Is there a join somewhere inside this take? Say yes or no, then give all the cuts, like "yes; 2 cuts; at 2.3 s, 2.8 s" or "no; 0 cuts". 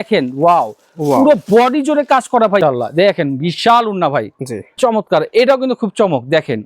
yes; 2 cuts; at 2.6 s, 4.8 s